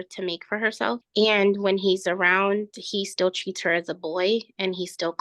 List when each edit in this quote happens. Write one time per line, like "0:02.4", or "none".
0:01.0